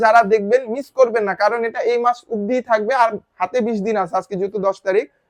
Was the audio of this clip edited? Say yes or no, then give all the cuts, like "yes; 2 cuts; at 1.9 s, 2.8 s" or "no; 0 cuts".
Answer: no; 0 cuts